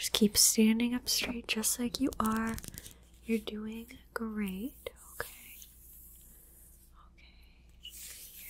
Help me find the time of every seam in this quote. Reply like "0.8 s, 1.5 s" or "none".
none